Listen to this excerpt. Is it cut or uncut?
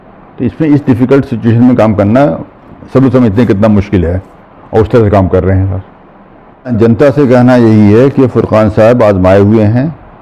cut